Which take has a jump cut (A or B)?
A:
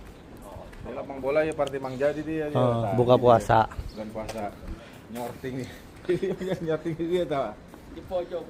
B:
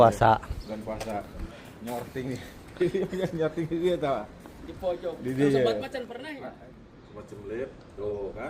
B